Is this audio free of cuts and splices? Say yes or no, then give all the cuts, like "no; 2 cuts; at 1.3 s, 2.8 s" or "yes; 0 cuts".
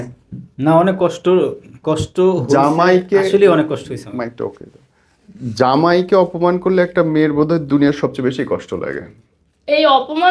yes; 0 cuts